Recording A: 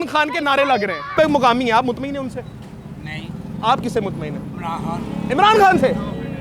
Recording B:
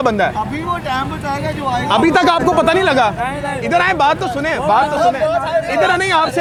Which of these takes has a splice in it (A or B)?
A